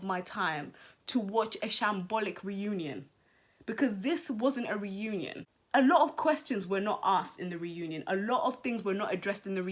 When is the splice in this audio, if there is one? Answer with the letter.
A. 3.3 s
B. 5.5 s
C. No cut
B